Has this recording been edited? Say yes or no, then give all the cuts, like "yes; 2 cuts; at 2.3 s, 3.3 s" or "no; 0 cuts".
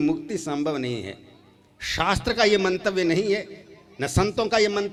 no; 0 cuts